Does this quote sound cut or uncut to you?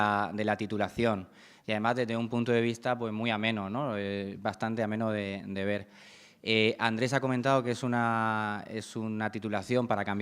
cut